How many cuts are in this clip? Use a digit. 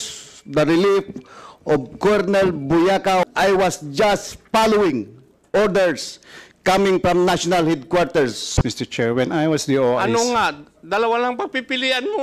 2